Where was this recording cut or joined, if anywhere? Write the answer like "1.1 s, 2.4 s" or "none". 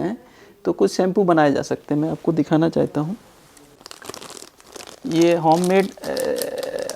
3.8 s